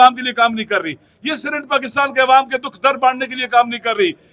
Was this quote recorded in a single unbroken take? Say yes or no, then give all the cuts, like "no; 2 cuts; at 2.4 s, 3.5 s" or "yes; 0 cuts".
yes; 0 cuts